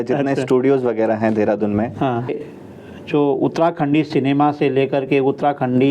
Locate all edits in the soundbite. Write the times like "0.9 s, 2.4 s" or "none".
2.4 s